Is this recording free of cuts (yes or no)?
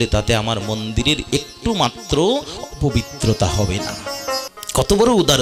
no